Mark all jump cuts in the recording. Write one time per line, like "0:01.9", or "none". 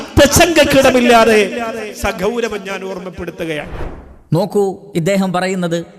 none